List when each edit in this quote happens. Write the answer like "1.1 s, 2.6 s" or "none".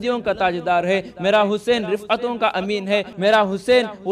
3.1 s